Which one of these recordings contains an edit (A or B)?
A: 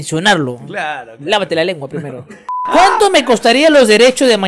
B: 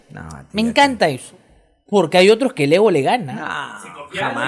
A